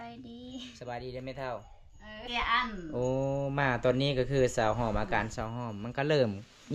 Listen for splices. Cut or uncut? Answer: cut